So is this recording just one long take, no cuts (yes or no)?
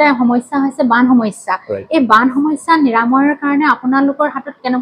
yes